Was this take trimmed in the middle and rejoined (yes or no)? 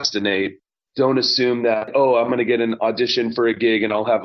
yes